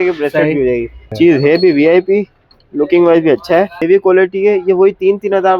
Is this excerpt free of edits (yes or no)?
no